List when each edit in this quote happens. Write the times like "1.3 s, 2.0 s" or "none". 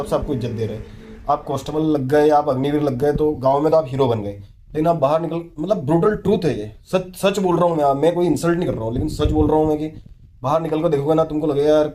5.5 s